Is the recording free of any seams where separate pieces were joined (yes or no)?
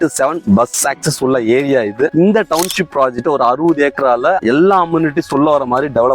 no